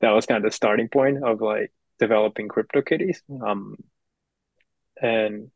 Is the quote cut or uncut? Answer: uncut